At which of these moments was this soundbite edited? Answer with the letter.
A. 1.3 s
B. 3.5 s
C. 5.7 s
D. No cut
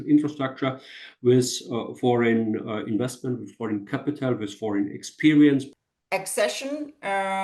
C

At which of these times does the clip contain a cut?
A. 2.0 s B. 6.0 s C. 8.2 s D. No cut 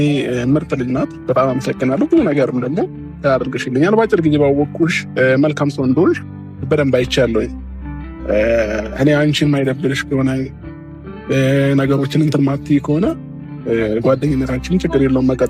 D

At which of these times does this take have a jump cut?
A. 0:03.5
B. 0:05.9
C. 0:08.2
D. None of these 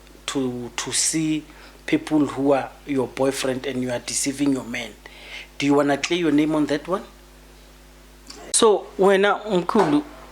C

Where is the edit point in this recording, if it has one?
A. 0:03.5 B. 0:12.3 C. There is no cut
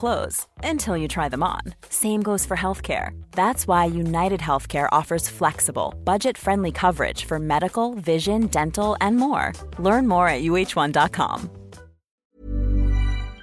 B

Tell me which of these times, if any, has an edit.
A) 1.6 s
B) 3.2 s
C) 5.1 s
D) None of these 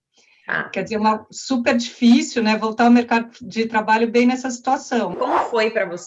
C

